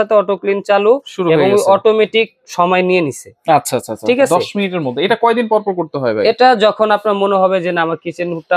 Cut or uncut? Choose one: uncut